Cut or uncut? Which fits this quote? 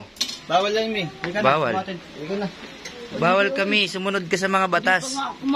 uncut